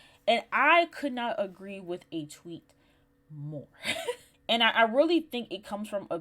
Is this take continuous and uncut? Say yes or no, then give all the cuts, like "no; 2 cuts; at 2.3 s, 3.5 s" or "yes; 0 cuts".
no; 1 cut; at 4.3 s